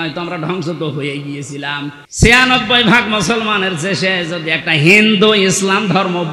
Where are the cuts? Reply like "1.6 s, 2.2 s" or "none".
2.0 s